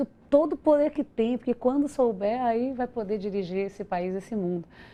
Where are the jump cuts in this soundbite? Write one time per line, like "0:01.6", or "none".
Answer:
none